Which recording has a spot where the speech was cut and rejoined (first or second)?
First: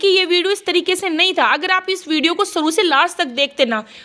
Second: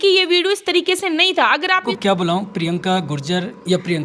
second